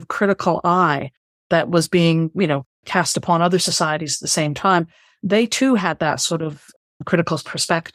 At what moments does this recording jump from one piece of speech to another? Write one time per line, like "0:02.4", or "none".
none

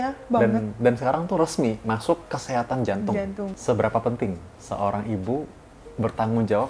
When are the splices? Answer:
0:03.6

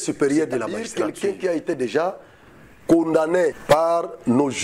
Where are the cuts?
0:00.8
0:03.6

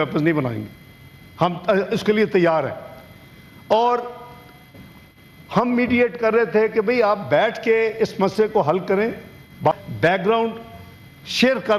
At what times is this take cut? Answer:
0:09.7

